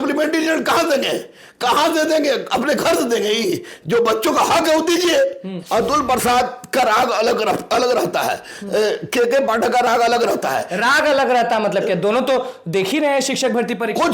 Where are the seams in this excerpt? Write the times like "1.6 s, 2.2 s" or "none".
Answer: 5.6 s